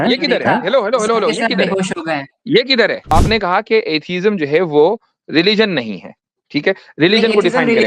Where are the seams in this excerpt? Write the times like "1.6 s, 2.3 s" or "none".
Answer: 3.1 s